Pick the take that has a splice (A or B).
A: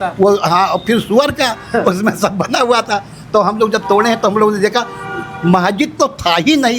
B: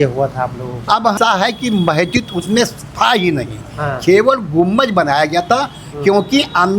B